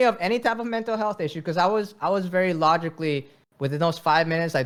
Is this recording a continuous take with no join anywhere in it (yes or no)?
yes